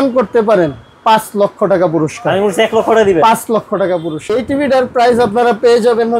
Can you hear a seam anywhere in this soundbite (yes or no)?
yes